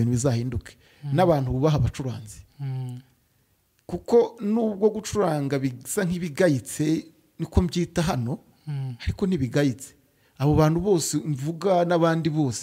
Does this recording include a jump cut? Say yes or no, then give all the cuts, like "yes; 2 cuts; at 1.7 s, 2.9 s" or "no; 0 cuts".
no; 0 cuts